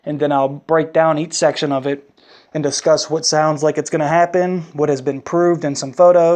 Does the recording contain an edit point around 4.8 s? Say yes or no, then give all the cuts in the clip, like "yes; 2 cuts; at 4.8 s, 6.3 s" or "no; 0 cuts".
no; 0 cuts